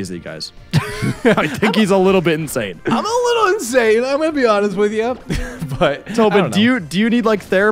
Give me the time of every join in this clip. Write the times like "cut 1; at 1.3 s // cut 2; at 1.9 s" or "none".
none